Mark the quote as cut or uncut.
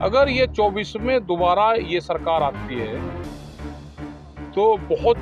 cut